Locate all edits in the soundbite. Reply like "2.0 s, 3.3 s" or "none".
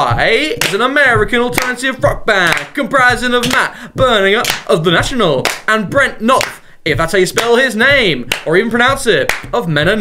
7.4 s